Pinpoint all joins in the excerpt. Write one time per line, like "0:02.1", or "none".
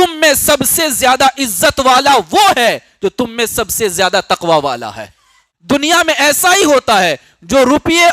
0:05.5